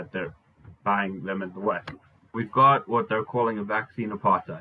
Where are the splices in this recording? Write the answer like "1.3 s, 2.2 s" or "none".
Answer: 2.3 s